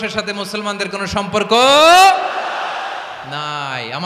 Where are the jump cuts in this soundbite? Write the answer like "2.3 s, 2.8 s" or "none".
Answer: none